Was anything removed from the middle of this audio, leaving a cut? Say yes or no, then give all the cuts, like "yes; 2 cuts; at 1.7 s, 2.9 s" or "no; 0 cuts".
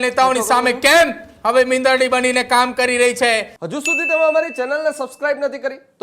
yes; 1 cut; at 3.6 s